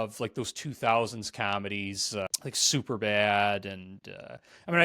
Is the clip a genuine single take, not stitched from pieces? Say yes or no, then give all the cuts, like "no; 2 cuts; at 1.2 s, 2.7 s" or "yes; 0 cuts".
no; 1 cut; at 2.3 s